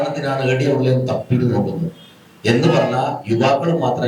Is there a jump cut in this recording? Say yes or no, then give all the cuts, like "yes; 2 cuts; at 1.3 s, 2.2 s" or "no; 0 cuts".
no; 0 cuts